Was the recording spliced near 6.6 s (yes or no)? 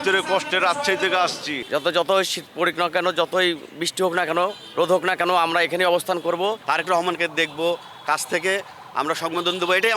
yes